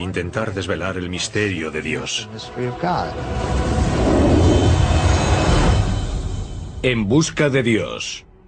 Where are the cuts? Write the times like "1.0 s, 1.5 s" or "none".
none

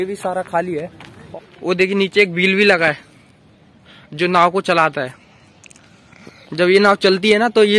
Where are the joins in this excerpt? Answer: 1.1 s

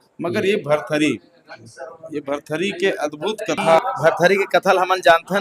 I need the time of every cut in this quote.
3.8 s

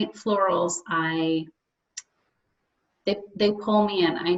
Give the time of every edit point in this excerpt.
none

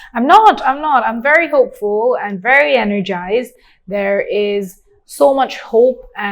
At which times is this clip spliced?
none

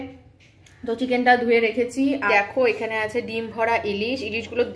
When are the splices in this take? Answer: 2.2 s

